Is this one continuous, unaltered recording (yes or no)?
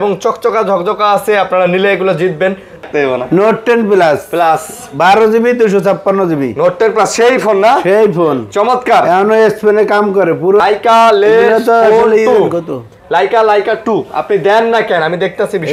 no